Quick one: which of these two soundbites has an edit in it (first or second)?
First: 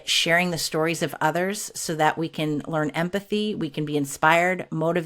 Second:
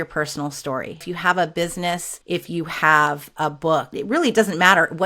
second